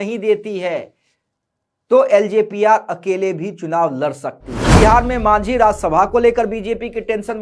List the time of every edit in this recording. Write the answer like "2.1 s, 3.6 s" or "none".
4.8 s